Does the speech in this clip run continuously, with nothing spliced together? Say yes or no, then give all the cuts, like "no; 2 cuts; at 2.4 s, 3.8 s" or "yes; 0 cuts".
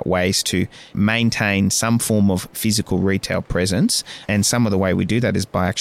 no; 2 cuts; at 0.9 s, 4.2 s